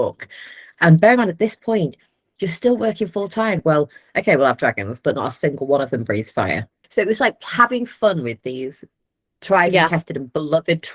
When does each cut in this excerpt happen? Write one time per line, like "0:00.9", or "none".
0:03.6
0:06.7